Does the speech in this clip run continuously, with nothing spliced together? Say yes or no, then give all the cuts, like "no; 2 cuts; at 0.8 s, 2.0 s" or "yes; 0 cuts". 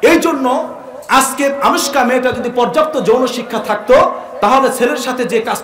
yes; 0 cuts